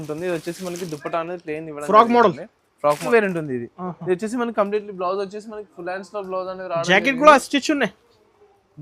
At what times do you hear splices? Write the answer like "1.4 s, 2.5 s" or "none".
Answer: 3.0 s